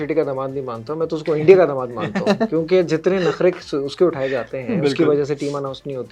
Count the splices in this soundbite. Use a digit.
0